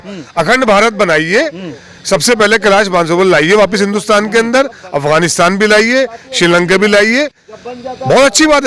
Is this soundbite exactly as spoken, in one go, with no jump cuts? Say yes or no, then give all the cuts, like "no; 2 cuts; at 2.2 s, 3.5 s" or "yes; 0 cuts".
yes; 0 cuts